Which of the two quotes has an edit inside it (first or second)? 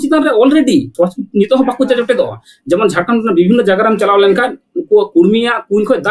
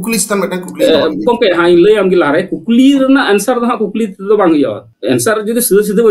first